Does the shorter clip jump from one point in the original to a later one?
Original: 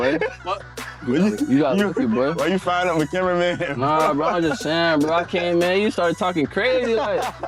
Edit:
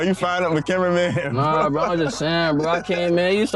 no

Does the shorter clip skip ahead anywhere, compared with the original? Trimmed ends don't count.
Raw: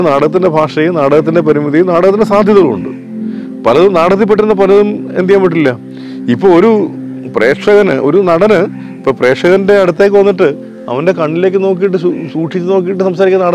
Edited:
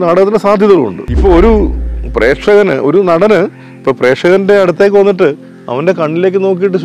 yes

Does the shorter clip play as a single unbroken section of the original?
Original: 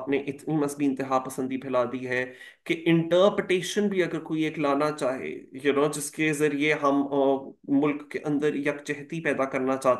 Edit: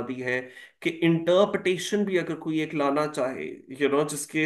yes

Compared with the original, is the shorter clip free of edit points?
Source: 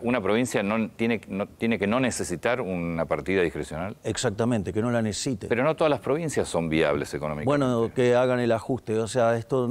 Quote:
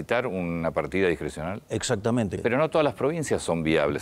no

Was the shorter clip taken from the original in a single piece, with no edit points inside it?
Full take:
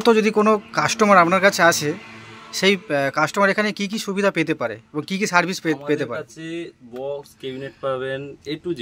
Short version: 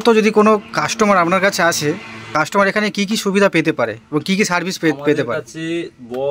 no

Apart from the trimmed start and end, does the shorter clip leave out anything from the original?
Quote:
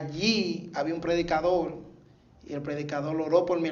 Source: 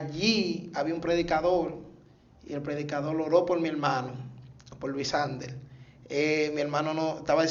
no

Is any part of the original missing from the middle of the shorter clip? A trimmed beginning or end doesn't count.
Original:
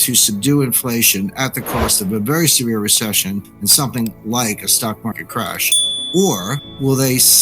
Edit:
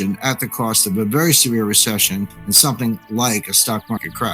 no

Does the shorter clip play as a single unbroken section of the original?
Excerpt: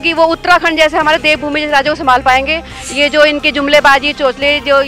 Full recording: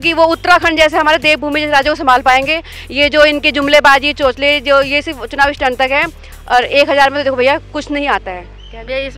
yes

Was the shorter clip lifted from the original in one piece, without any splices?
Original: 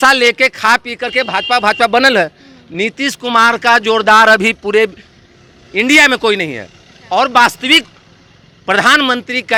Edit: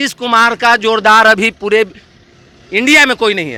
yes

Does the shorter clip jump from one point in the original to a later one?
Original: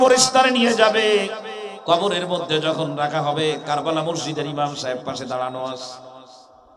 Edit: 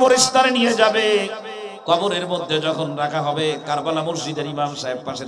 no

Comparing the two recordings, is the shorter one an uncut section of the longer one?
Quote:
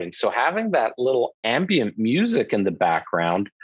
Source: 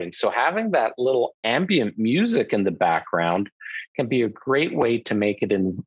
yes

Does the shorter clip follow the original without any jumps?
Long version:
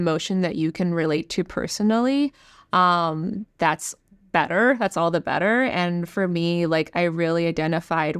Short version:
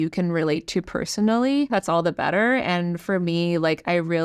no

